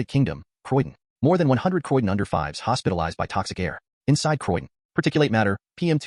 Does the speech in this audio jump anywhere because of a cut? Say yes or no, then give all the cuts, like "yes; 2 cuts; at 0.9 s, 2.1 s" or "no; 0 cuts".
no; 0 cuts